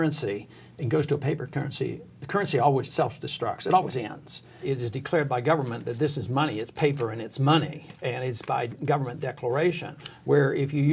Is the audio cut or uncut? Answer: cut